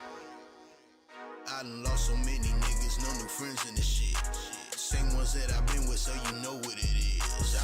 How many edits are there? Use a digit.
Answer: 1